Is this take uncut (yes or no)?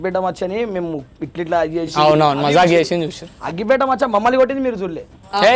yes